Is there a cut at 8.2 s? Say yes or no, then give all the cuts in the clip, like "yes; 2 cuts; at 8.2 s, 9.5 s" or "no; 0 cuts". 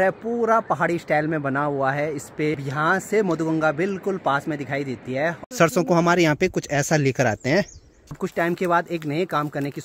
yes; 3 cuts; at 2.5 s, 5.4 s, 8.2 s